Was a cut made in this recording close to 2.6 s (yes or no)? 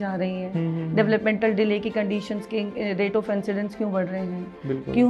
no